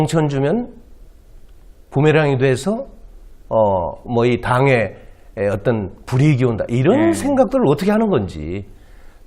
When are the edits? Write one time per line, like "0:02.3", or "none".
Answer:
0:06.2